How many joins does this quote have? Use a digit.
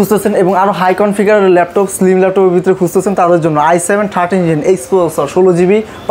0